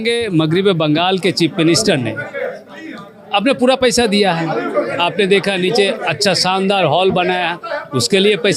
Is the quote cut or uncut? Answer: uncut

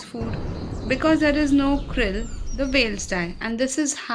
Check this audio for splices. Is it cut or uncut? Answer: uncut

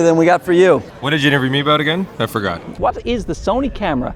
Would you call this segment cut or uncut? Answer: cut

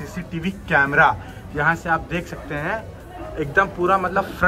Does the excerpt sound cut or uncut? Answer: uncut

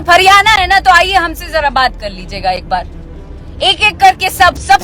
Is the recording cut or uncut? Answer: uncut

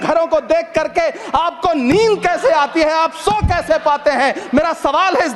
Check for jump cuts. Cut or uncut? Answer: uncut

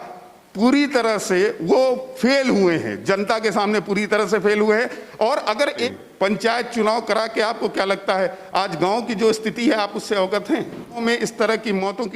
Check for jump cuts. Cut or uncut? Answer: cut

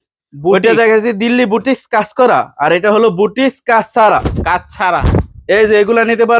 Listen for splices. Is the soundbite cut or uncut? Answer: uncut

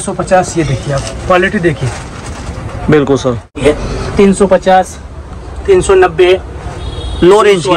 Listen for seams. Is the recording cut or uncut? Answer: cut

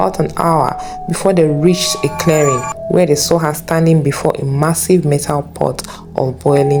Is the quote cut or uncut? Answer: uncut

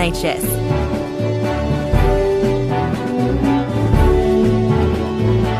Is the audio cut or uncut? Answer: uncut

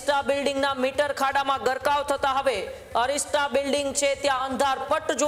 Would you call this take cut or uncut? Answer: uncut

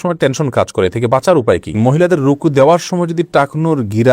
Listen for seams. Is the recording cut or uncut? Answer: cut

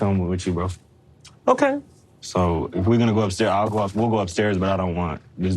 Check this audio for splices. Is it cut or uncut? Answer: cut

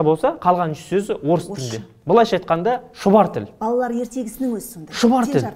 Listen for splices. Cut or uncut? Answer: uncut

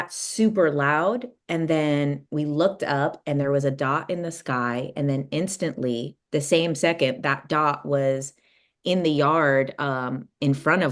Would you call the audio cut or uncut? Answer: uncut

